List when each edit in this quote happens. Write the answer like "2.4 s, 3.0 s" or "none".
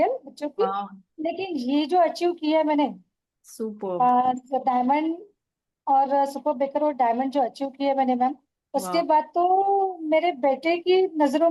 none